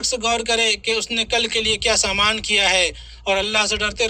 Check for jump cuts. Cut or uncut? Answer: uncut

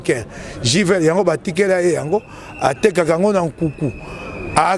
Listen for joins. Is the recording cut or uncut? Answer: uncut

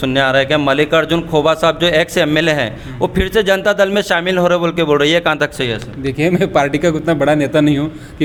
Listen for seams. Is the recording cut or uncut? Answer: uncut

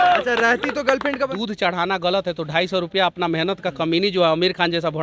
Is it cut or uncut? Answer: cut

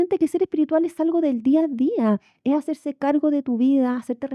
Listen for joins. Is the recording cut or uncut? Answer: uncut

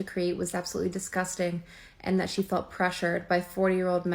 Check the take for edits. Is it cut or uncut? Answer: uncut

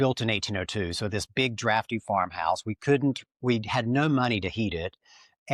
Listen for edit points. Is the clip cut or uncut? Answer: uncut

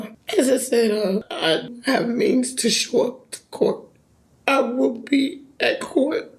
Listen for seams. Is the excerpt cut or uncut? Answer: uncut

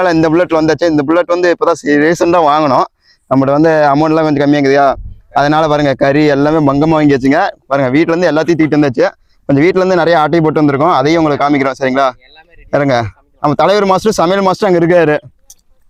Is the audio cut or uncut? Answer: uncut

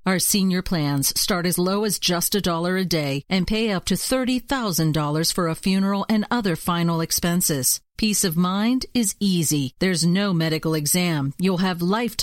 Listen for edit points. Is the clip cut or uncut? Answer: uncut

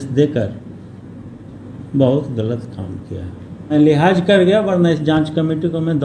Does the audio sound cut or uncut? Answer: cut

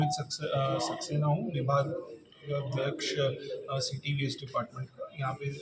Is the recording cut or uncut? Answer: uncut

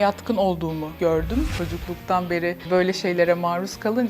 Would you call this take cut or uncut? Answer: cut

